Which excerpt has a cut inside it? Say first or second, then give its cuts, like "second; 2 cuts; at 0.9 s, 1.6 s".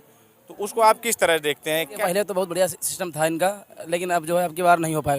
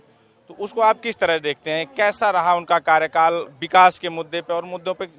first; 1 cut; at 1.9 s